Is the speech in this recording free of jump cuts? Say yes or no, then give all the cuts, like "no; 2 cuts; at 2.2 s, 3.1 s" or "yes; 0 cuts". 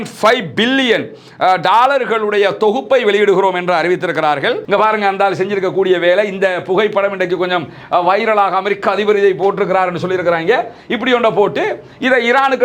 no; 1 cut; at 4.6 s